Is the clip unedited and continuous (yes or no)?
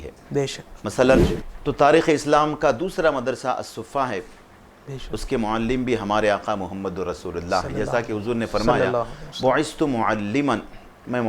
no